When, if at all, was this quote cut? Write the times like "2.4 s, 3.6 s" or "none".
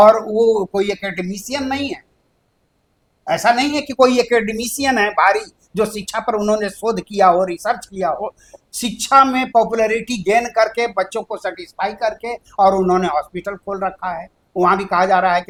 none